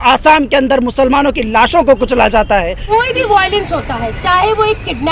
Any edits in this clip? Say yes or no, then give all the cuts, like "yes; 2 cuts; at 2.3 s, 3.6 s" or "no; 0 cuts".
yes; 1 cut; at 2.8 s